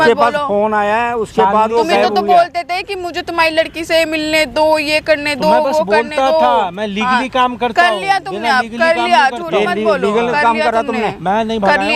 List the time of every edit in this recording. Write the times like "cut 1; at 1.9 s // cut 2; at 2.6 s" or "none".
none